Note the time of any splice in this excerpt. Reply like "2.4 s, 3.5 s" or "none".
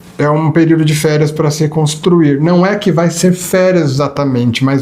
none